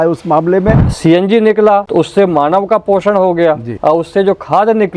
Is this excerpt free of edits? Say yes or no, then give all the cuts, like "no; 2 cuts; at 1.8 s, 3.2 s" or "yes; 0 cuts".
no; 3 cuts; at 0.9 s, 1.9 s, 3.7 s